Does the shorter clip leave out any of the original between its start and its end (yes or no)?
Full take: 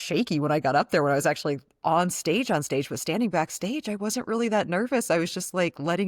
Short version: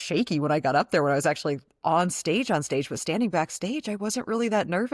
no